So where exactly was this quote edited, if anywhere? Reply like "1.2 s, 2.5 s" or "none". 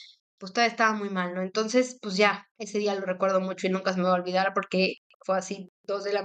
2.5 s